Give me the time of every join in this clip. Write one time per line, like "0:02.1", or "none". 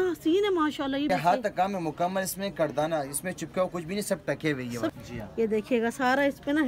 0:01.1
0:04.9